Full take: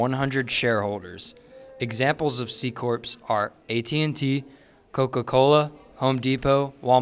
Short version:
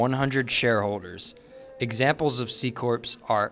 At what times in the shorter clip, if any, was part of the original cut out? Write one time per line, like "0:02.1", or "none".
none